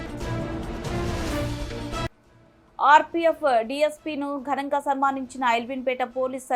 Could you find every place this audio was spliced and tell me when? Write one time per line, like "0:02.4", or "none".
0:02.2

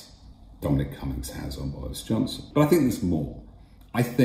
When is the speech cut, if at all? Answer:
0:02.4

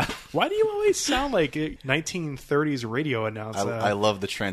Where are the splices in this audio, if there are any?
0:01.8

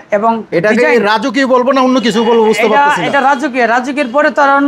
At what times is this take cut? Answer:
none

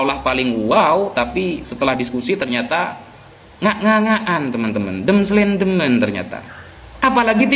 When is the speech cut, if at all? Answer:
none

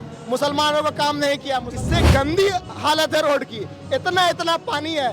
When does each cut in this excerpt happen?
0:01.8

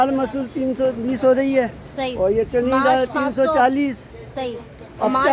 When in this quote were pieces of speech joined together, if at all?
none

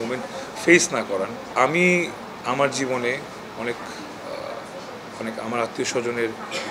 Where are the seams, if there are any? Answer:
none

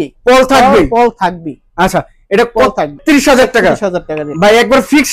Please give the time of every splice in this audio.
0:03.0

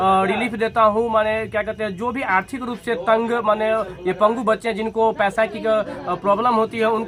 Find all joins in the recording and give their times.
none

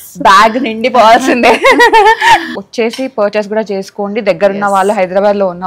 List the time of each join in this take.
0:02.5

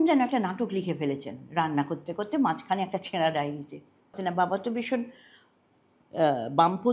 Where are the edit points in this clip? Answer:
0:04.2

